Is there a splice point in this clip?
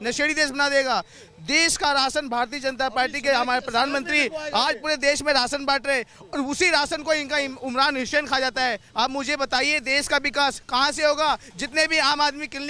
no; 0 cuts

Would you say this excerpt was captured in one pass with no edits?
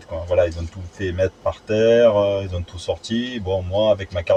yes; 0 cuts

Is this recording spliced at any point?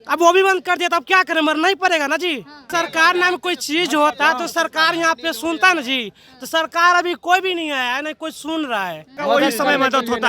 yes; 2 cuts; at 2.6 s, 9.2 s

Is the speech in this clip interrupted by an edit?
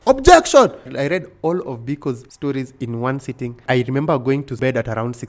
yes; 4 cuts; at 0.9 s, 2.3 s, 3.6 s, 4.6 s

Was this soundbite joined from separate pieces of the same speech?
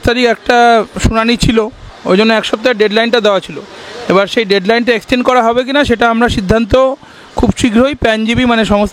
no; 0 cuts

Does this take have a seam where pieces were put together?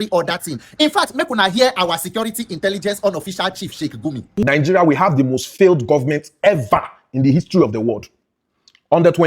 yes; 1 cut; at 4.4 s

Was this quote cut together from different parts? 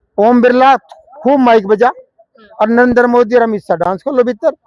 no; 0 cuts

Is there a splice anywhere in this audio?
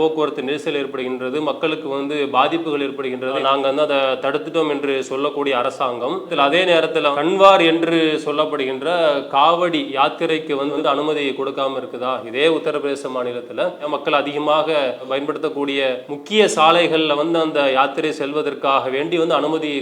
yes; 4 cuts; at 7.2 s, 10.7 s, 13.9 s, 16.1 s

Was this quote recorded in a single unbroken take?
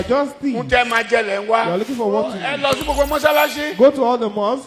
no; 1 cut; at 2.5 s

